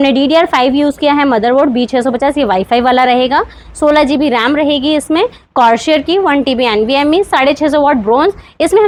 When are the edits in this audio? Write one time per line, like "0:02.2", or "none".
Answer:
none